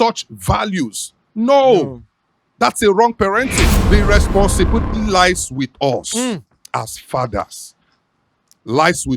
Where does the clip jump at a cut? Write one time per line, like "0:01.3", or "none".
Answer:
0:03.8